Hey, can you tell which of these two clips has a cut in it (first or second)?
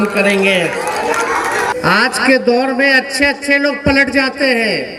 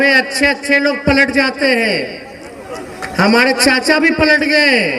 first